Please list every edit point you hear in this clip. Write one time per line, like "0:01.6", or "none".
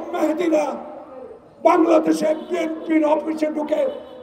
none